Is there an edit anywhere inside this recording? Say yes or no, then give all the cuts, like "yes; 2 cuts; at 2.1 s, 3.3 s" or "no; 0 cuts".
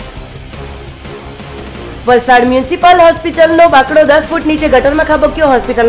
yes; 1 cut; at 1.8 s